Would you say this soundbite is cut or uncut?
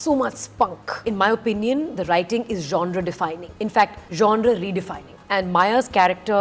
uncut